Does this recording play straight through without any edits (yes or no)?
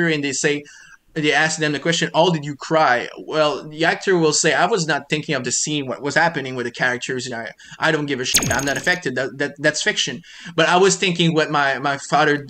yes